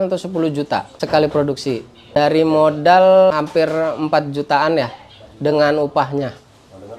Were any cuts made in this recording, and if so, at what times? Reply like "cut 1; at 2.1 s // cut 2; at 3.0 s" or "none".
cut 1; at 0.9 s // cut 2; at 2.1 s // cut 3; at 3.3 s